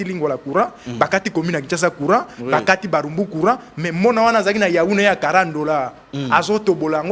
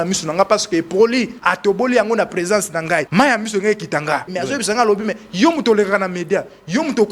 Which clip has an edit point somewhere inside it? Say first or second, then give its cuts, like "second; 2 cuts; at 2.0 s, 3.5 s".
second; 3 cuts; at 1.4 s, 3.1 s, 4.3 s